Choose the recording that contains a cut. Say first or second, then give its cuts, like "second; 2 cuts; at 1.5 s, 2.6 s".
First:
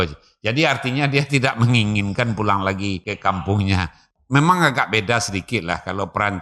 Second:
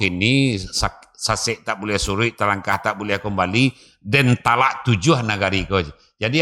first; 2 cuts; at 3.1 s, 4.0 s